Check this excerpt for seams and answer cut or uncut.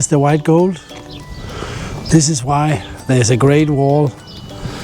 uncut